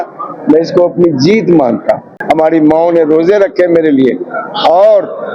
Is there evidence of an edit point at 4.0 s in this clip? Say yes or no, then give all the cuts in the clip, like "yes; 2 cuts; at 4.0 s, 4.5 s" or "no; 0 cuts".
no; 1 cut; at 2.1 s